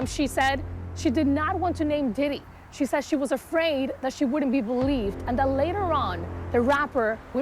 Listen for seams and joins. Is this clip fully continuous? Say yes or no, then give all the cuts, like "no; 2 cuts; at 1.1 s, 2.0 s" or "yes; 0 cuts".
yes; 0 cuts